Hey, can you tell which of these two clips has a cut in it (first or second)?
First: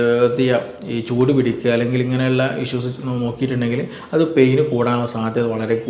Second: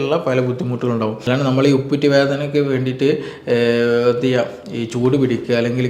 second